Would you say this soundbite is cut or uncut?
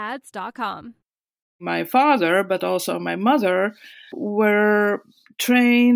cut